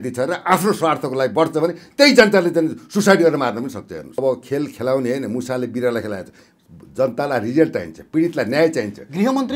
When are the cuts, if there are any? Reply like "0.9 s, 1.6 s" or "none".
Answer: 4.2 s